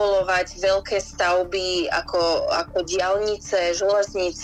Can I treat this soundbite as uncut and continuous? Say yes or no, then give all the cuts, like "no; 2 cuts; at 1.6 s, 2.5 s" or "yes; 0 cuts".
yes; 0 cuts